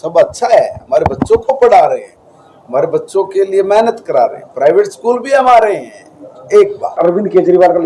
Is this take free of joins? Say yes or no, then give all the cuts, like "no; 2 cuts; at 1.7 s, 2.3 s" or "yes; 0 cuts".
no; 2 cuts; at 4.8 s, 7.0 s